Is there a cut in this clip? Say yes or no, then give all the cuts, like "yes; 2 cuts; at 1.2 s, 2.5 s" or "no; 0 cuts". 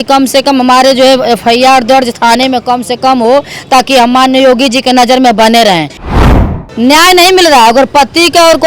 yes; 1 cut; at 6.1 s